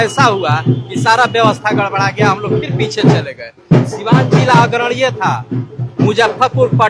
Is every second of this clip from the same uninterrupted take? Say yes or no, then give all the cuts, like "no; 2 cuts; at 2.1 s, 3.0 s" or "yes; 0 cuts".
yes; 0 cuts